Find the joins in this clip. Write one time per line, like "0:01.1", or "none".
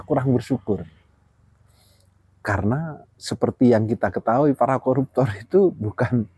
0:03.2